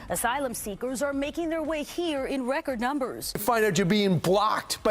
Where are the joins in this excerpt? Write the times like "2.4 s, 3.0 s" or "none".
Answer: 3.4 s